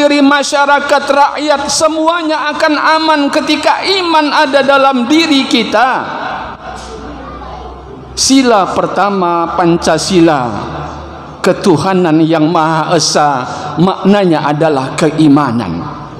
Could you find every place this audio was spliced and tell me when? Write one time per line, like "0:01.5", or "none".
none